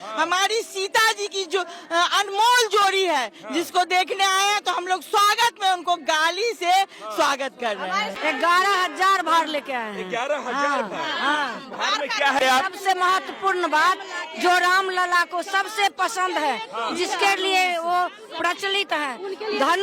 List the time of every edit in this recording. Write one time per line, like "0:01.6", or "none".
0:08.1
0:12.4